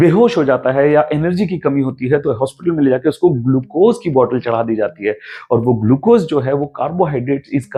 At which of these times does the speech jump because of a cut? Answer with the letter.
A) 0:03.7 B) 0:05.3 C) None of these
C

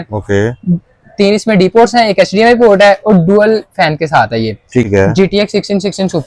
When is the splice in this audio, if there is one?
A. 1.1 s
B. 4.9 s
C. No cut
B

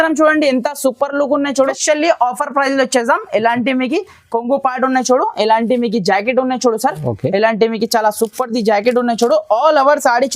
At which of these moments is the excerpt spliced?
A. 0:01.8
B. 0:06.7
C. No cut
A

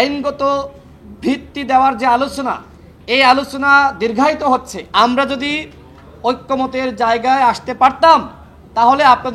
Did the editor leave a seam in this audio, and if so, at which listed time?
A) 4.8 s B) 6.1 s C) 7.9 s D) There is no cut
A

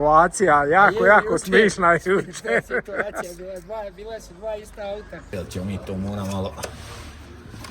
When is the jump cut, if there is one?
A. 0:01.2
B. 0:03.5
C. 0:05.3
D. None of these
C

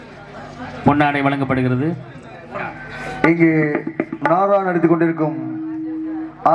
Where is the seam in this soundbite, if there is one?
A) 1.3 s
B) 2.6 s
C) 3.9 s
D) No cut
B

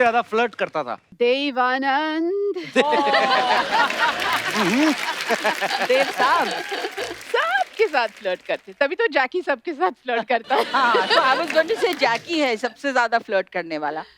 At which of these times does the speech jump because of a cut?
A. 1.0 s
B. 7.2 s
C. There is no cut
A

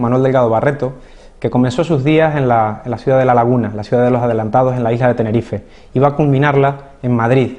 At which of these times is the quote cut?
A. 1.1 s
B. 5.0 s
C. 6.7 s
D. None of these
B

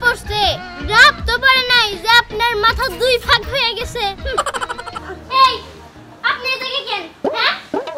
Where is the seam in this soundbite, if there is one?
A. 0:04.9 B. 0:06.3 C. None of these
A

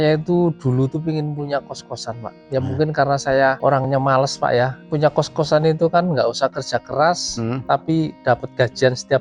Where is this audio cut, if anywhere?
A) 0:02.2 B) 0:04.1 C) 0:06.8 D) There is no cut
D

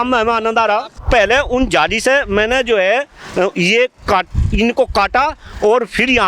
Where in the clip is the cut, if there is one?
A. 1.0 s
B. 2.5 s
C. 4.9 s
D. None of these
A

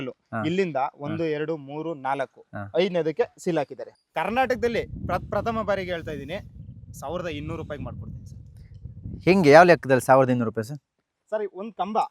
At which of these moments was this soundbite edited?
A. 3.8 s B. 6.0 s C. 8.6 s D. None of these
A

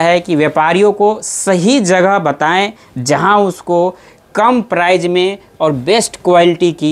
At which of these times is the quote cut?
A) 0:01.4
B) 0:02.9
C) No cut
C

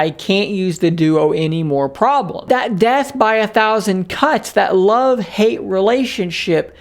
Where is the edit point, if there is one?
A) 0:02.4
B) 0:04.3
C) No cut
A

